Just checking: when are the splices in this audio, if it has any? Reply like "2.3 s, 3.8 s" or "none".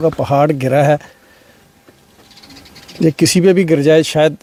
none